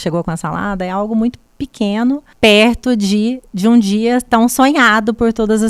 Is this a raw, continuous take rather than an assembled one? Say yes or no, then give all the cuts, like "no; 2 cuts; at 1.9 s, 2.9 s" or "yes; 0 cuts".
no; 1 cut; at 2.3 s